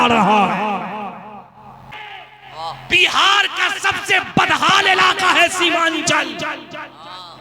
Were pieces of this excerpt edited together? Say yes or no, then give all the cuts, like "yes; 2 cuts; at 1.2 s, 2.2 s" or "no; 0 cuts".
yes; 1 cut; at 2.0 s